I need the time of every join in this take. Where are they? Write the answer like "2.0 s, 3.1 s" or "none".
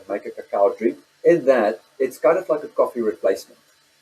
1.0 s